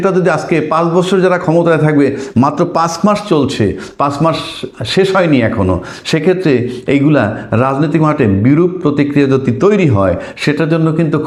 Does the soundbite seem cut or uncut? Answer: uncut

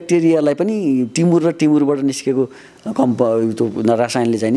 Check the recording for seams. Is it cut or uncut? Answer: uncut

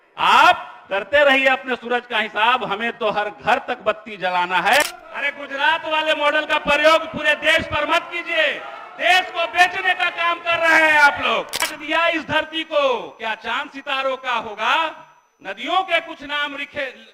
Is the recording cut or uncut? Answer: cut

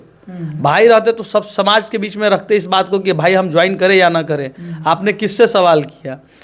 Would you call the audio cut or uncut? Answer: uncut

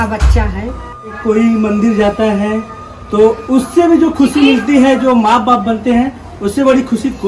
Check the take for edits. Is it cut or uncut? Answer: cut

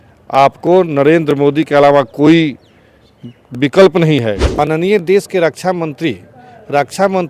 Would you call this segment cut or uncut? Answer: cut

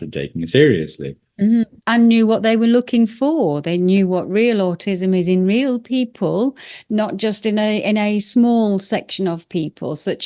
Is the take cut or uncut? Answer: uncut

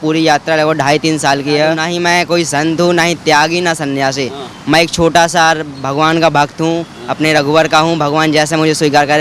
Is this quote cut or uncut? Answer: cut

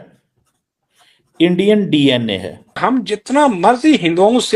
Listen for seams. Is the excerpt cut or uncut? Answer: cut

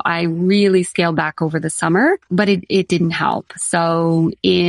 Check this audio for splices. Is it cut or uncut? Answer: cut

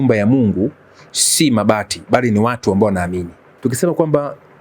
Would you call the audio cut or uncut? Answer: cut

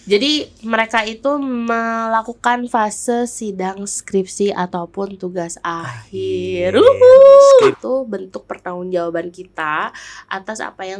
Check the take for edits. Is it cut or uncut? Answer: cut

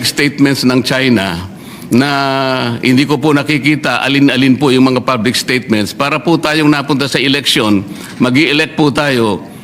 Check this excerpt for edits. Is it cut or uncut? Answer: uncut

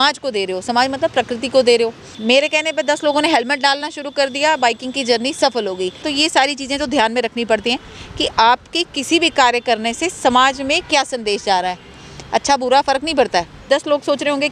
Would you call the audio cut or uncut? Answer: cut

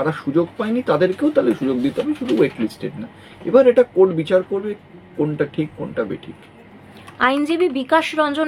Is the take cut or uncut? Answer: uncut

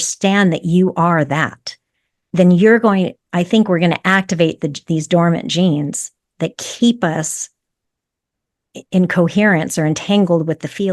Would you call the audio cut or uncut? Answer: uncut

